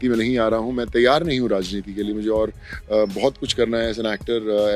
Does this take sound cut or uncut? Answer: uncut